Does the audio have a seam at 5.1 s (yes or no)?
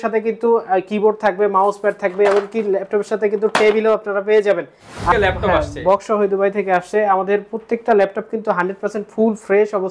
yes